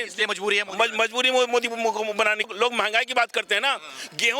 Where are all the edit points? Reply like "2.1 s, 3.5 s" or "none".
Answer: 2.5 s